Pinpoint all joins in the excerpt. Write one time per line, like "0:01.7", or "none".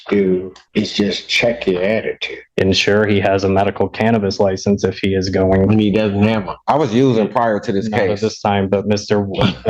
0:02.5